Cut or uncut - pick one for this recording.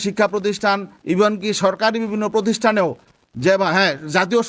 uncut